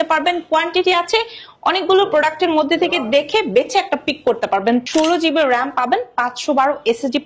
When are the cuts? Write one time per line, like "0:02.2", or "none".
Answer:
0:04.8